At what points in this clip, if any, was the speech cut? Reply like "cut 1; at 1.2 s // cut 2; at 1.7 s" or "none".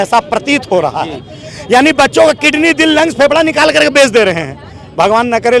none